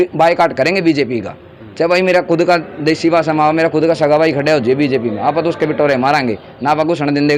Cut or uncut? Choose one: uncut